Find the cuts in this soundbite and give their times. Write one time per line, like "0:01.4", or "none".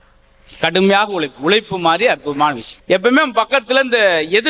0:02.7